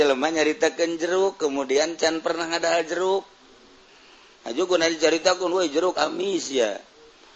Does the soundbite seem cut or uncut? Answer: uncut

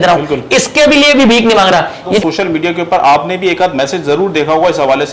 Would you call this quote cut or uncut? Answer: cut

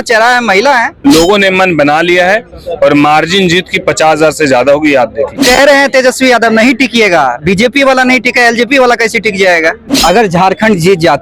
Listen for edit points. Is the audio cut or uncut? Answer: cut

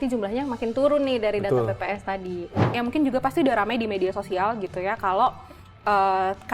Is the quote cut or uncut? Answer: cut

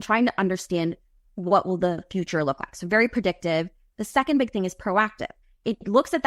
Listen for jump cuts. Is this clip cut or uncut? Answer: uncut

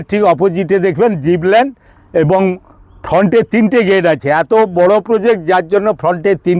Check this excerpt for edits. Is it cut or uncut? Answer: uncut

